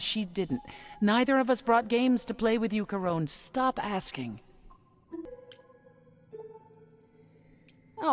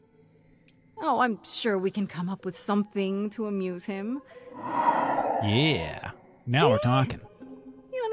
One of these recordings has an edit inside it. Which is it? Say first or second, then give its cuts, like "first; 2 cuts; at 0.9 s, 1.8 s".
first; 1 cut; at 5.3 s